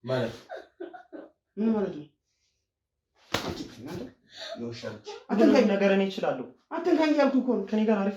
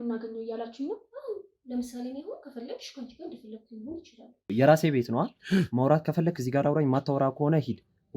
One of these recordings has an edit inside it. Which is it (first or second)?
second